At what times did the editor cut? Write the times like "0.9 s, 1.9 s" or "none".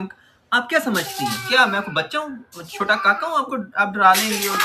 none